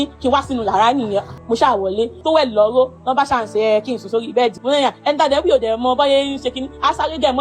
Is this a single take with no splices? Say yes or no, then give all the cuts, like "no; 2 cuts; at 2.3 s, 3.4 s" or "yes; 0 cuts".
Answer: no; 3 cuts; at 1.3 s, 2.2 s, 4.6 s